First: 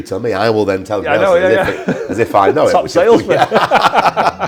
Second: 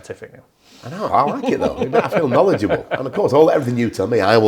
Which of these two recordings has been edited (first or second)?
second